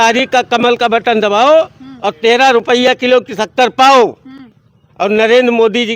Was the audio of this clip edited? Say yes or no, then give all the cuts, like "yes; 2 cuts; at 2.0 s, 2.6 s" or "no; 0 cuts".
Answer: no; 0 cuts